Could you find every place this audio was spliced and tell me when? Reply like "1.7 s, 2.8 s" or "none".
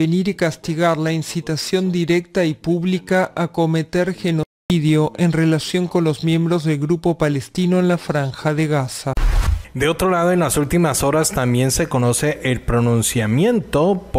9.2 s